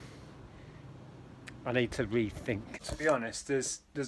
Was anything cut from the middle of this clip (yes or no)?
yes